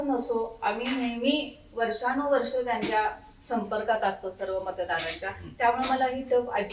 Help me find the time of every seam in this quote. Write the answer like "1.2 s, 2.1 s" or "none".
none